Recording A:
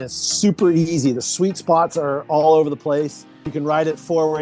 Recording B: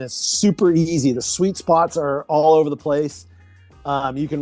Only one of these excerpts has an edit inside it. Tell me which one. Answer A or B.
A